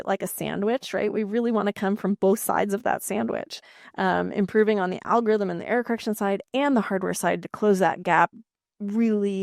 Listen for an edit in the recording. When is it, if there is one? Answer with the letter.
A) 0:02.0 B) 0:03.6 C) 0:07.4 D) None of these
D